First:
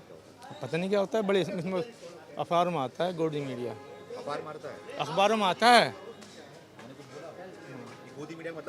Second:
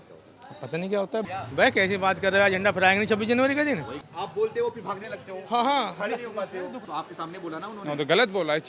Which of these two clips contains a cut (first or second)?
second